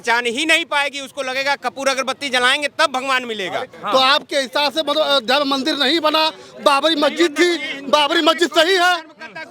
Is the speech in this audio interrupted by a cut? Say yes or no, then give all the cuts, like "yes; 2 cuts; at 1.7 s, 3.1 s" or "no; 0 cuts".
yes; 1 cut; at 3.8 s